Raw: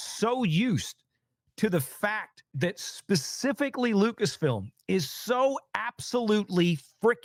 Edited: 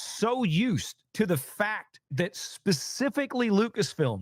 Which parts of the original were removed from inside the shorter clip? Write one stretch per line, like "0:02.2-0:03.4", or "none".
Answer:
0:01.0-0:01.4